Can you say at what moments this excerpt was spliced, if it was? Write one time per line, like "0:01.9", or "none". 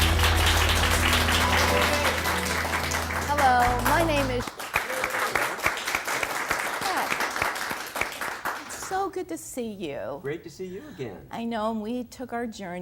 none